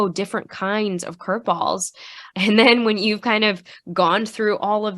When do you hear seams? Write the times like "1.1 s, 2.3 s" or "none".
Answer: 2.2 s

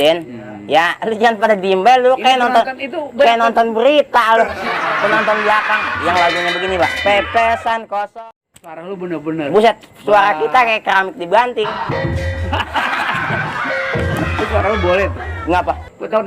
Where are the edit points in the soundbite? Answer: 8.1 s

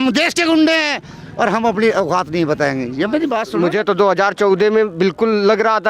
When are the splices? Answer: 3.5 s

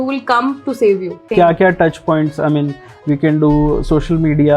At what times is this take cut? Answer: 1.2 s

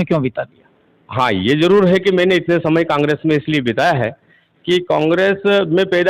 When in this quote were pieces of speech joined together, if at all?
none

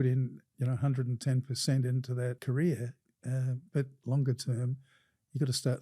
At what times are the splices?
2.4 s, 4.0 s

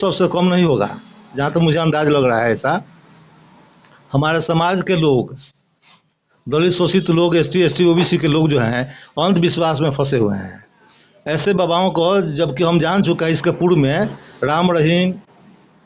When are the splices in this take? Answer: none

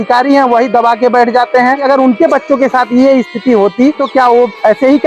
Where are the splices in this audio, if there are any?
1.8 s, 4.0 s

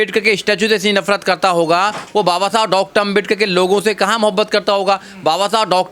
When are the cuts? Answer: none

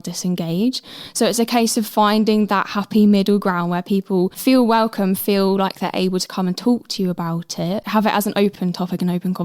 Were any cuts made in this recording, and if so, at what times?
4.4 s, 7.8 s, 8.6 s

